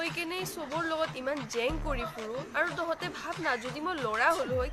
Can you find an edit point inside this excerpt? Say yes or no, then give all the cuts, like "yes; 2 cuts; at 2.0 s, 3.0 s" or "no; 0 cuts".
no; 0 cuts